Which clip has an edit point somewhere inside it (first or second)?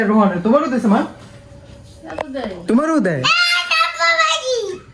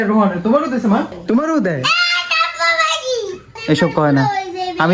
second